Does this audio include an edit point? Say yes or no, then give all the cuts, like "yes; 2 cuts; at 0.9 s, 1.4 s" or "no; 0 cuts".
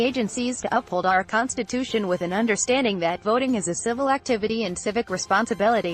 no; 0 cuts